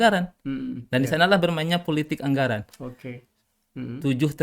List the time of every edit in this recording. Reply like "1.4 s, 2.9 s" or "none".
none